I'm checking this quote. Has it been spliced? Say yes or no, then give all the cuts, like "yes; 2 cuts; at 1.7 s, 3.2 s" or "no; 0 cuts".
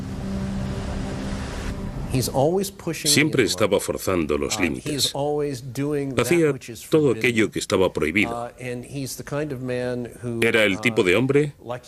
no; 0 cuts